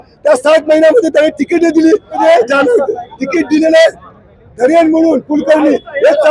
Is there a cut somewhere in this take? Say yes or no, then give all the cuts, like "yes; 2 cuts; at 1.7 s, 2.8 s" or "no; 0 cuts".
yes; 1 cut; at 2.2 s